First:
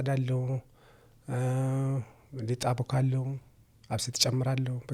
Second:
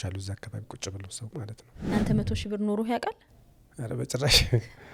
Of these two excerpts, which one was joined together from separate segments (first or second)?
second